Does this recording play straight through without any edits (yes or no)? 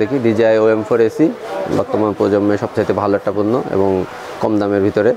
yes